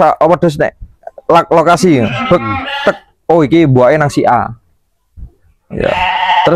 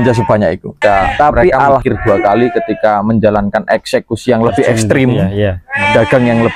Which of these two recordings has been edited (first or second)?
second